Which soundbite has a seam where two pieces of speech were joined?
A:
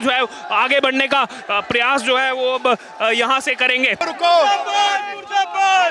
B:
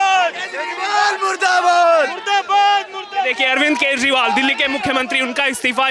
A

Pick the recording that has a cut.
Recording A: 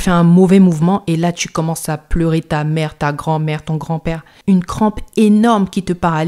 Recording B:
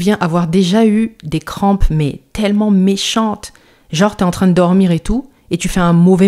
A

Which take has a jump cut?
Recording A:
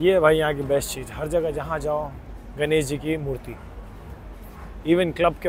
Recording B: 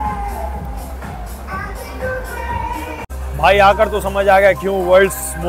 B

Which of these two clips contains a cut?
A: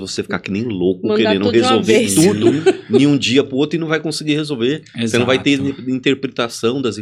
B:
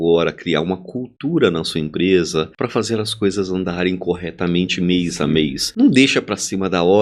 B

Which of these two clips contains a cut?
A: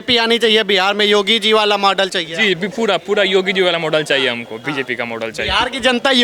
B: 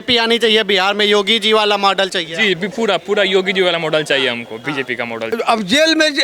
B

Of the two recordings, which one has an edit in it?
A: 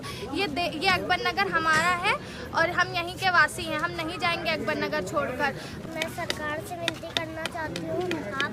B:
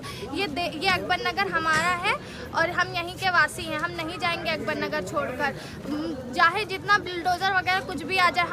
A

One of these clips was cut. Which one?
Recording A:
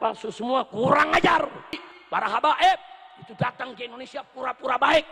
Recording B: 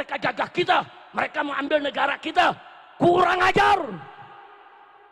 A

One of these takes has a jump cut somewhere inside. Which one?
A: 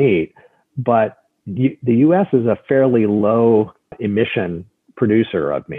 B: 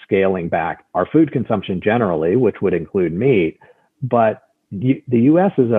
A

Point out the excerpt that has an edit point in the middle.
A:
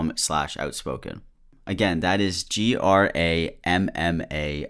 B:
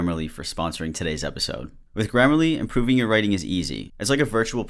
B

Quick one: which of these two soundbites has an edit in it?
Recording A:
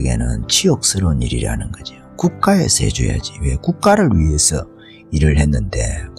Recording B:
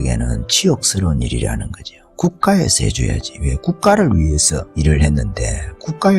B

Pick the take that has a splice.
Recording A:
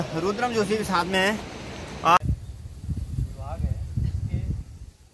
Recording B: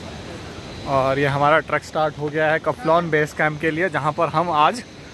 A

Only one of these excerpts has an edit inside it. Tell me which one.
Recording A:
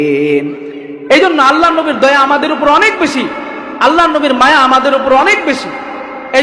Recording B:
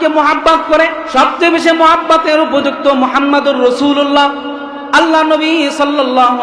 B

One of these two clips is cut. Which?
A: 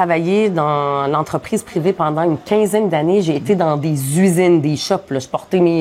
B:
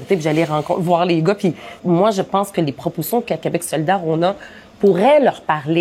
B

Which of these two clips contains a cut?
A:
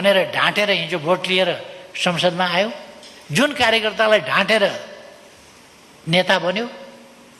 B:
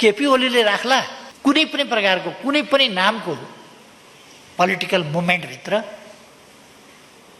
B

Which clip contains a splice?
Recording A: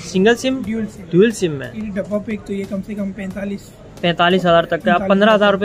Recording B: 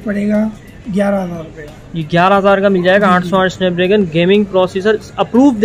A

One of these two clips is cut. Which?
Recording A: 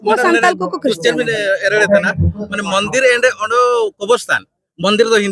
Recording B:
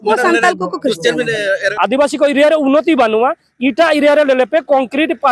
B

